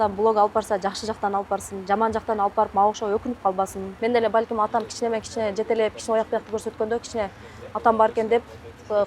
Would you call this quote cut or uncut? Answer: cut